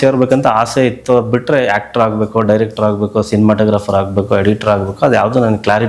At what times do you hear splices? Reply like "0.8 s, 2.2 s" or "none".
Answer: none